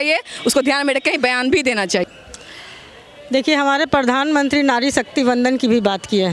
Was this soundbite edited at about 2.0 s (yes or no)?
yes